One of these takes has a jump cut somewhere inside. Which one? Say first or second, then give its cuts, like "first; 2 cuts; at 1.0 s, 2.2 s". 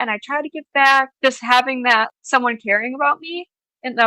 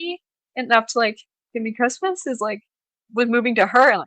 first; 2 cuts; at 1.1 s, 2.1 s